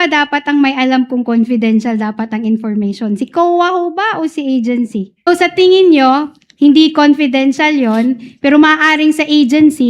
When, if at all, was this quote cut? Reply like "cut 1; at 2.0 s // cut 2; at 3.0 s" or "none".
cut 1; at 5.3 s